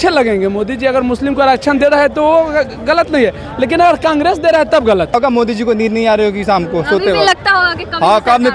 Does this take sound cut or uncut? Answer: cut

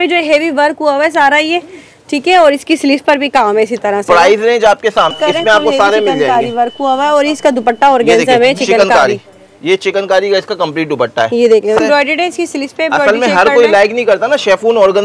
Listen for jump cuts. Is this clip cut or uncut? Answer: cut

